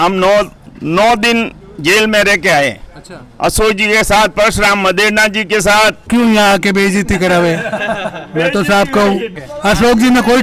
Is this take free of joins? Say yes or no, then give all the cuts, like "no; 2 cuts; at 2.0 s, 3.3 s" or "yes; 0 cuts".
no; 2 cuts; at 6.0 s, 9.3 s